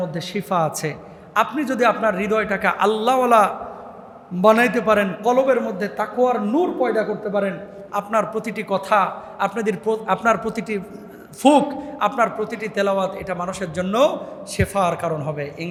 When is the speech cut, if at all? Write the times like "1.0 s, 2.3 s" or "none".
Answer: none